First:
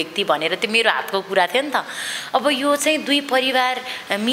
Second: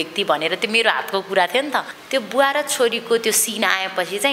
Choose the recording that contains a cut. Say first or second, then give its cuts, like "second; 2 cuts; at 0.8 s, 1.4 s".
second; 1 cut; at 2.0 s